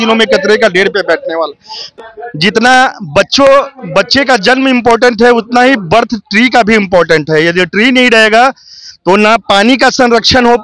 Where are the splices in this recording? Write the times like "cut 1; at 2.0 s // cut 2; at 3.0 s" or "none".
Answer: cut 1; at 1.8 s